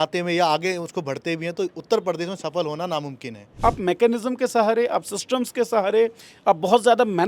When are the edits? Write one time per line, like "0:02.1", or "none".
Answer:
0:03.5